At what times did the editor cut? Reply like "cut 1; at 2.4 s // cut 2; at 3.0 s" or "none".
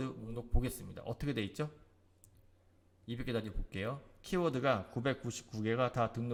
none